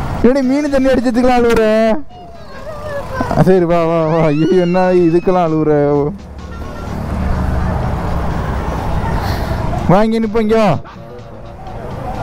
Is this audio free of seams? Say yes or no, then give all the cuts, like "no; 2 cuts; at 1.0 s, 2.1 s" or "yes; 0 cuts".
yes; 0 cuts